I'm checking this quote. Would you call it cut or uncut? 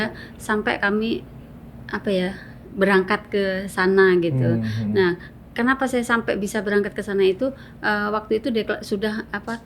uncut